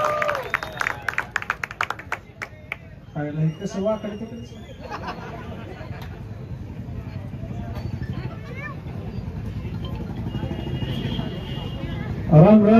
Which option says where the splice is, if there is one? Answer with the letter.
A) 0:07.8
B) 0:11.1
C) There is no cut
C